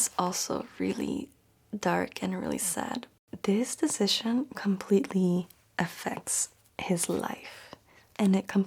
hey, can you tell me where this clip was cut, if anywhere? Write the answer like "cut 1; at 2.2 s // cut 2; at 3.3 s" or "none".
cut 1; at 3.2 s